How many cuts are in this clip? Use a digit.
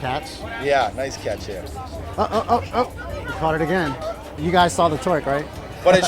1